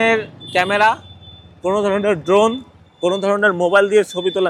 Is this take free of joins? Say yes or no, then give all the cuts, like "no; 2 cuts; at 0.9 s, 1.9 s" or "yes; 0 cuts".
yes; 0 cuts